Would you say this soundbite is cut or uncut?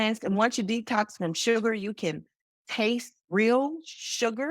cut